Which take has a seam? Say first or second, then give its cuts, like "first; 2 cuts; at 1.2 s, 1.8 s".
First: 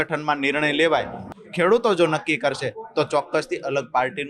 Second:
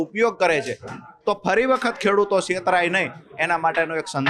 first; 1 cut; at 1.2 s